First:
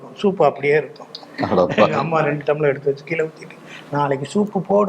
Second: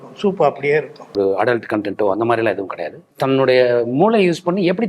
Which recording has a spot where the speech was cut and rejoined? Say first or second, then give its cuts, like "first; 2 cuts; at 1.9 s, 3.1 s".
second; 2 cuts; at 1.2 s, 3.1 s